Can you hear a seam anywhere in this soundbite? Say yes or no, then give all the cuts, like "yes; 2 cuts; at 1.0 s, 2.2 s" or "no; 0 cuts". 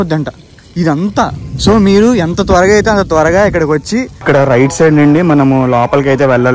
yes; 1 cut; at 4.1 s